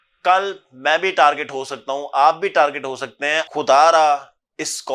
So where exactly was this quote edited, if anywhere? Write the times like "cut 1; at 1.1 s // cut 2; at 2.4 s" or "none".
cut 1; at 3.4 s